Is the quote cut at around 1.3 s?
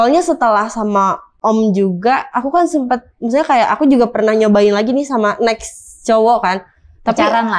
yes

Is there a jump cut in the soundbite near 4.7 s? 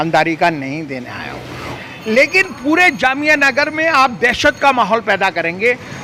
no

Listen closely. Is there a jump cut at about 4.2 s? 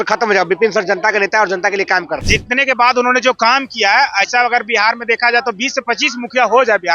no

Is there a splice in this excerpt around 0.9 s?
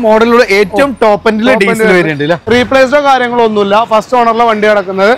no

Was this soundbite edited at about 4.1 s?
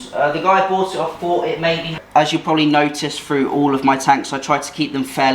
no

